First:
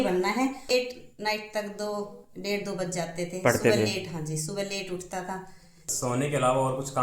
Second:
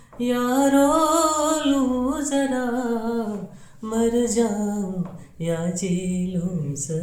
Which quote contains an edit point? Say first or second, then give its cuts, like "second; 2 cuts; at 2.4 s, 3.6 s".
first; 2 cuts; at 0.7 s, 5.9 s